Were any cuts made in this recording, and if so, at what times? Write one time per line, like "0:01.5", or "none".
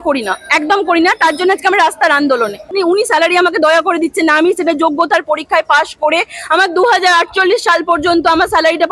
0:02.7